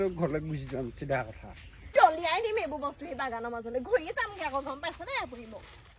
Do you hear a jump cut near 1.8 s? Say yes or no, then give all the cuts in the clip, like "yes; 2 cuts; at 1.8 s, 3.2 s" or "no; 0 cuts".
yes; 1 cut; at 1.8 s